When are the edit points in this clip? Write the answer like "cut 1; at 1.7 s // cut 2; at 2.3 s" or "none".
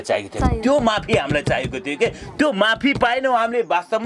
none